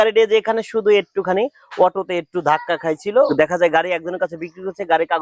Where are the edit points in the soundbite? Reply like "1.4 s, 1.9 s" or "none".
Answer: 3.3 s

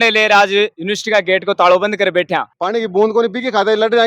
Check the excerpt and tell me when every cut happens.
2.5 s

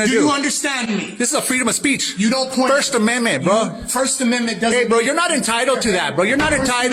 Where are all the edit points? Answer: none

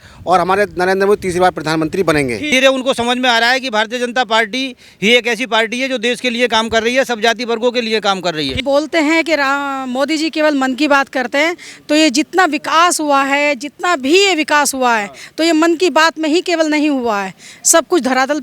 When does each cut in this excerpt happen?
2.5 s, 8.6 s

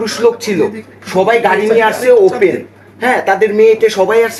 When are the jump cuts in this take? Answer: none

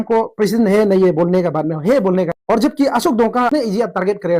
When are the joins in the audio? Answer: 2.4 s, 3.5 s

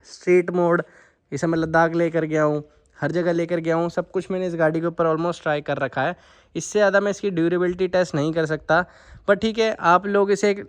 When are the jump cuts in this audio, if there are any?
none

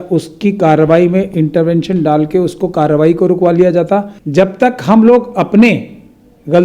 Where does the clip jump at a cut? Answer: 4.2 s

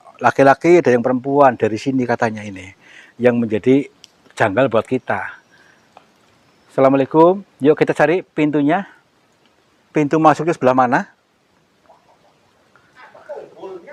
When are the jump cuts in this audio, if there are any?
none

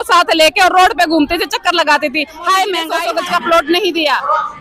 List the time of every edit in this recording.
2.9 s

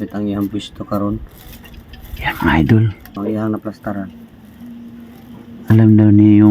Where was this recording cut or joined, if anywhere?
3.1 s

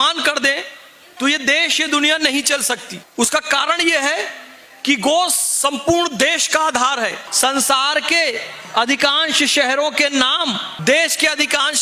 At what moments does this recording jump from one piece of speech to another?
3.0 s, 7.2 s

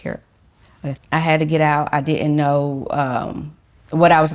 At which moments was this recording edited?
1.0 s

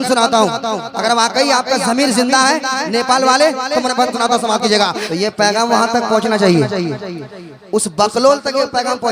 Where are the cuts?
5.0 s

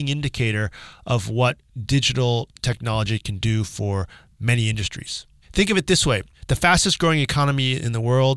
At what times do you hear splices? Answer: 5.3 s, 6.3 s

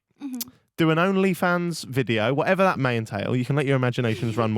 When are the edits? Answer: 2.8 s

